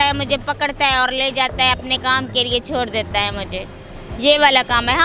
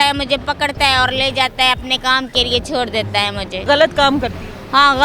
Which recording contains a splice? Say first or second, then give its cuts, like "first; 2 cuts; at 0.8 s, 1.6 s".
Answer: second; 1 cut; at 3.5 s